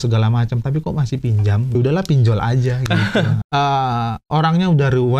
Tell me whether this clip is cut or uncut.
cut